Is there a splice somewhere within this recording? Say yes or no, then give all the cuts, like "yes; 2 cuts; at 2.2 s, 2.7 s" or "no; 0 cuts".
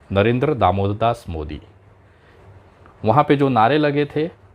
yes; 1 cut; at 2.3 s